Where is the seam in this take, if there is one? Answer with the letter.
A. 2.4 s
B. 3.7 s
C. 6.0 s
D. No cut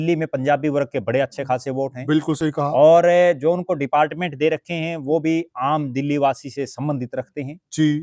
D